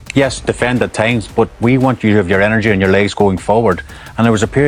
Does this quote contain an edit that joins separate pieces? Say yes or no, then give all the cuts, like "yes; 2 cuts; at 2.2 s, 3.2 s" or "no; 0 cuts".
no; 0 cuts